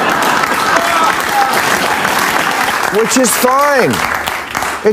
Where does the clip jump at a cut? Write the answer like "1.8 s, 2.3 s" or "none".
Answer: 2.7 s